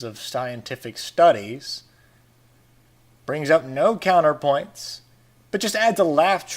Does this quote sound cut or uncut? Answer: cut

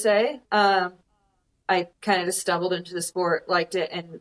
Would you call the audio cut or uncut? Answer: uncut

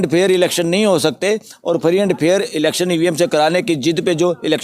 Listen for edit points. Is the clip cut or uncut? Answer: uncut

